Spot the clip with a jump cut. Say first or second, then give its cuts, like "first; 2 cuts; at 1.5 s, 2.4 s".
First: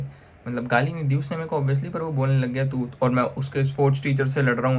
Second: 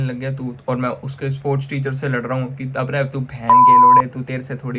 second; 2 cuts; at 3.5 s, 4.0 s